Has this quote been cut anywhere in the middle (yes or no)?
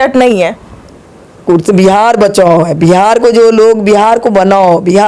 no